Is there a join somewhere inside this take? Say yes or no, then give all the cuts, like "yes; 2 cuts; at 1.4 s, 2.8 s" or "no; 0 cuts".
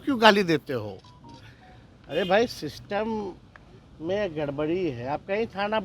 no; 0 cuts